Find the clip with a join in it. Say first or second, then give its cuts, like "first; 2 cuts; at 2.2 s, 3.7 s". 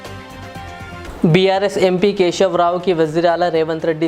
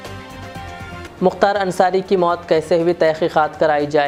first; 1 cut; at 1.0 s